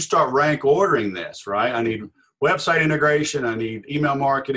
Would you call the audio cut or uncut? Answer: uncut